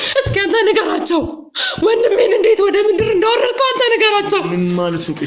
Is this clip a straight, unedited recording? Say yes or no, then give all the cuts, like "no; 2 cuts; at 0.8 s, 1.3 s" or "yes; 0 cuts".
yes; 0 cuts